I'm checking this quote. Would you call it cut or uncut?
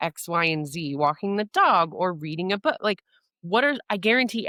uncut